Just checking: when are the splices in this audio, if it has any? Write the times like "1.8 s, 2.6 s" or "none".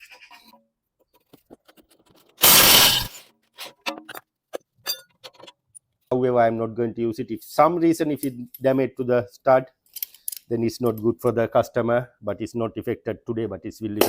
6.1 s